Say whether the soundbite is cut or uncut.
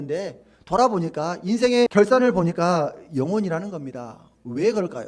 cut